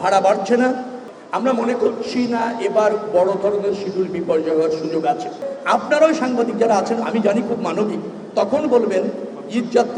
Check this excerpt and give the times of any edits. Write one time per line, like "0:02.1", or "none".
0:01.0
0:05.5